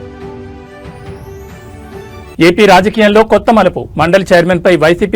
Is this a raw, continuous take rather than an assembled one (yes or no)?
no